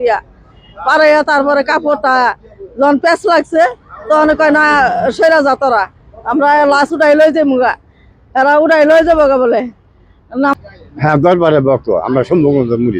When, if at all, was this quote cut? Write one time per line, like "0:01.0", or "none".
0:10.5